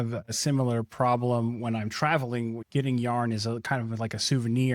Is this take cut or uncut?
uncut